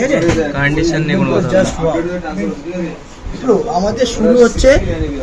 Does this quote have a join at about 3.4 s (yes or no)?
yes